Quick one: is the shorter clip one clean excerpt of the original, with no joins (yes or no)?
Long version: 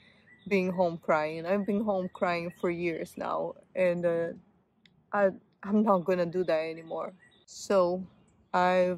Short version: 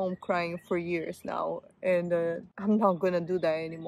no